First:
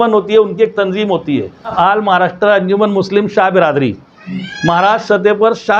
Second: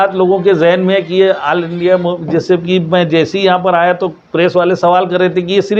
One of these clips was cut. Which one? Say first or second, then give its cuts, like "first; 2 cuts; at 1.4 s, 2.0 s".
first; 1 cut; at 1.7 s